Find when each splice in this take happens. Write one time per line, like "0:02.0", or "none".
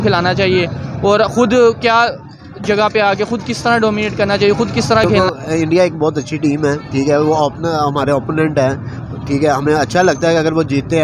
0:05.0